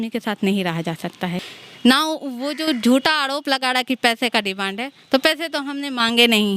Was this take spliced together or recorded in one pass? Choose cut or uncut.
cut